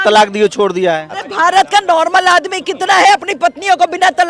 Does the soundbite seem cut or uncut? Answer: cut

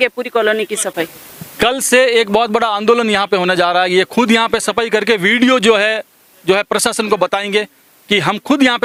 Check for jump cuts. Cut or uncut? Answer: uncut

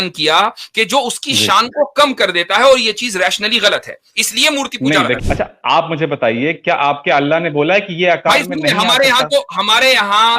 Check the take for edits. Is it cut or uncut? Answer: cut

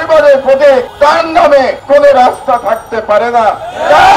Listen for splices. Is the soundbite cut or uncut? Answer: cut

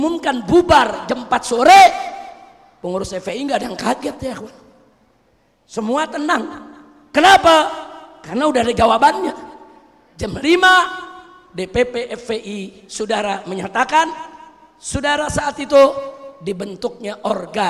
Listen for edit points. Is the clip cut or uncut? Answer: uncut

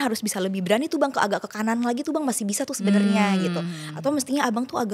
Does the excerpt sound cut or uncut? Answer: uncut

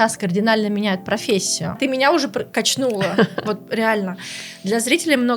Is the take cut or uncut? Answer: cut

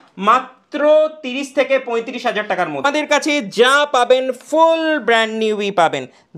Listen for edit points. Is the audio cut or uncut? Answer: cut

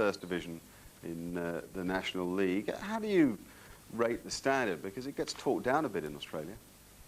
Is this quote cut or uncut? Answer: cut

